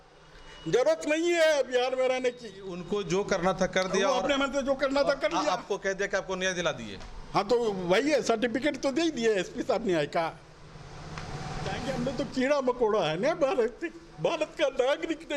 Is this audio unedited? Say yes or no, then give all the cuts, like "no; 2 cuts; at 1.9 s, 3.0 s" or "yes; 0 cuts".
no; 2 cuts; at 2.8 s, 11.8 s